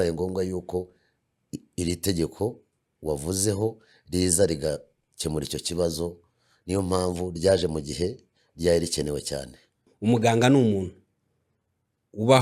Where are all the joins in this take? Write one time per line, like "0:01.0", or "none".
0:09.9